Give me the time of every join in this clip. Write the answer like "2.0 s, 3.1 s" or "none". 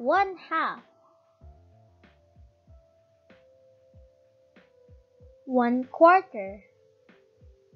0.8 s, 5.4 s, 6.6 s